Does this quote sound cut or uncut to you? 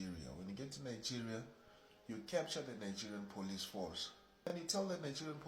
cut